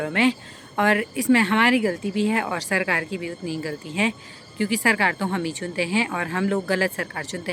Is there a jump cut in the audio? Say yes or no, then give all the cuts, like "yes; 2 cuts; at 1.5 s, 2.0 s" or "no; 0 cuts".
no; 0 cuts